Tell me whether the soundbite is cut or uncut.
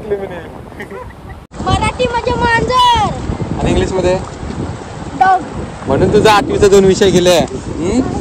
cut